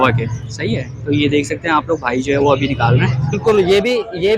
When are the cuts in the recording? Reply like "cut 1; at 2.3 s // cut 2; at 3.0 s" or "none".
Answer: cut 1; at 3.4 s